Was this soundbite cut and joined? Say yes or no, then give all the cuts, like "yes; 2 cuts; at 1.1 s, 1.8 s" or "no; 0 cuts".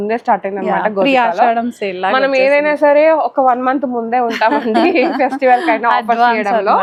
no; 0 cuts